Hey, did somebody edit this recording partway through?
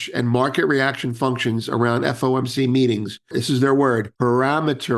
yes; 2 cuts; at 3.4 s, 4.1 s

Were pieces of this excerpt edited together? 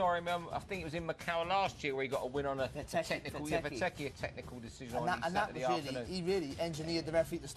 yes; 1 cut; at 1.4 s

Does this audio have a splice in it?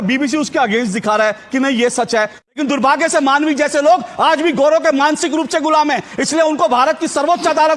yes; 1 cut; at 2.4 s

